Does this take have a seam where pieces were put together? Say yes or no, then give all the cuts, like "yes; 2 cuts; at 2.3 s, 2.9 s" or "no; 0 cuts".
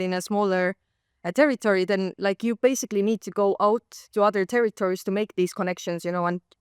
no; 0 cuts